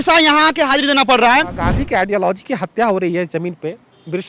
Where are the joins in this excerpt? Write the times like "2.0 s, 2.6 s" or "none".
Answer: 1.6 s

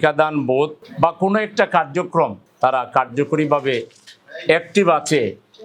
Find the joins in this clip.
2.4 s

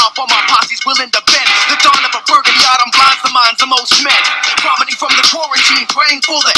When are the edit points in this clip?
4.4 s

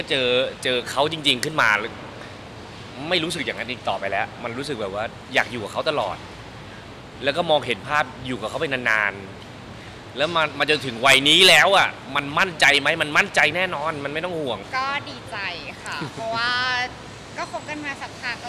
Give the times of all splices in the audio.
14.6 s

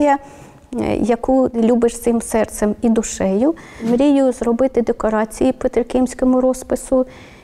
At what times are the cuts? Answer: 1.5 s, 3.8 s

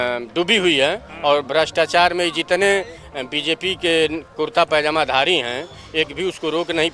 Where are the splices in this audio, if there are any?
none

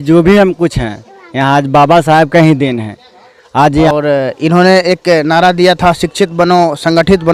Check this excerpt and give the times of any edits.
3.9 s

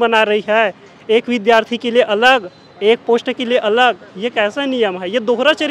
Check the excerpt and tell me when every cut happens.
none

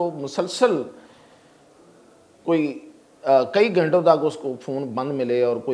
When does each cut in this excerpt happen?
none

